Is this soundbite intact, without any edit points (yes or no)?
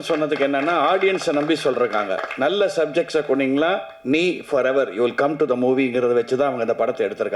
yes